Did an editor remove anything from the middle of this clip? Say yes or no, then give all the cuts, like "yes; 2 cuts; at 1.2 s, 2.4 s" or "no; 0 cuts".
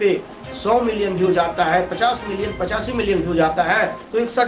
no; 0 cuts